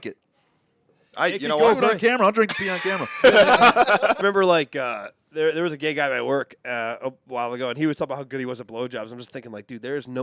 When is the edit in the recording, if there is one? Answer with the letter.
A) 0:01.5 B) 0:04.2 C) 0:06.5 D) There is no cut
B